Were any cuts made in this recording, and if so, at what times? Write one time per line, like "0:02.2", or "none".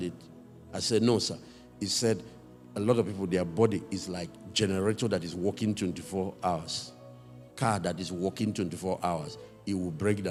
none